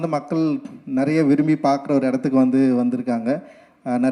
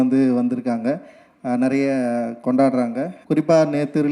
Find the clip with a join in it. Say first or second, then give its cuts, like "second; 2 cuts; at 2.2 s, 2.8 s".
second; 1 cut; at 3.1 s